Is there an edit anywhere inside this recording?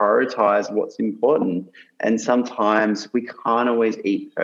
no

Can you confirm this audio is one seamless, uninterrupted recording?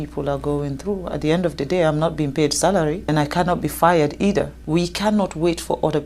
no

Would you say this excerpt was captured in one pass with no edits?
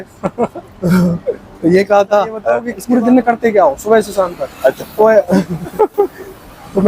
no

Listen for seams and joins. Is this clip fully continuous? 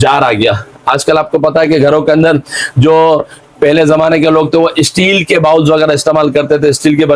yes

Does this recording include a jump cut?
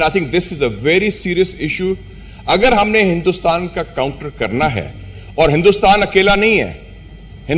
no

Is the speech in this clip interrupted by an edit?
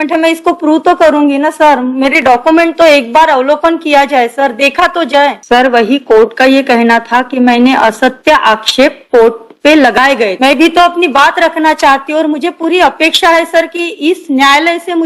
yes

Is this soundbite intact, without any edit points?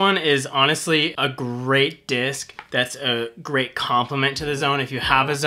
no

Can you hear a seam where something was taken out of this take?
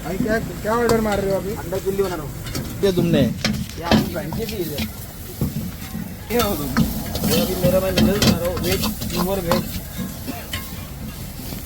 yes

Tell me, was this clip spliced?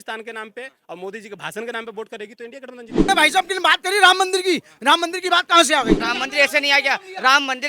yes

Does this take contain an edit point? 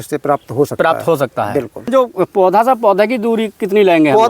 yes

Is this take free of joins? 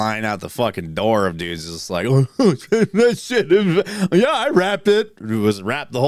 yes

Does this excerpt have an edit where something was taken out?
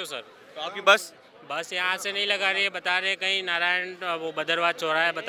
no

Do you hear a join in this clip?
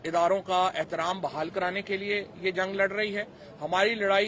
no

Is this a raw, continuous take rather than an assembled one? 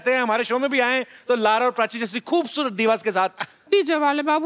no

